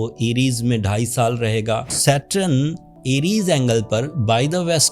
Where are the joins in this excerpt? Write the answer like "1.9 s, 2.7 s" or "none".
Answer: 1.9 s